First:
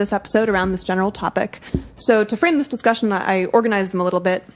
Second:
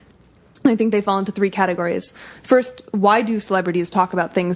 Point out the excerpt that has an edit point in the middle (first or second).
first